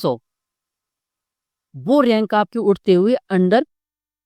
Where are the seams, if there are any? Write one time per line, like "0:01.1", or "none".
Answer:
none